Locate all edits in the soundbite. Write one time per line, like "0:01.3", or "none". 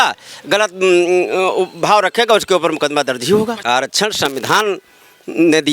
0:03.6